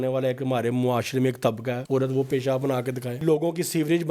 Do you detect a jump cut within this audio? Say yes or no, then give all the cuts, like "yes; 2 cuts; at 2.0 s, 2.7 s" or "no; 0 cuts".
yes; 2 cuts; at 1.8 s, 3.2 s